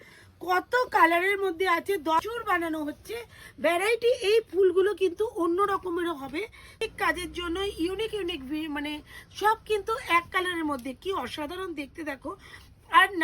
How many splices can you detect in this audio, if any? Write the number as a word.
two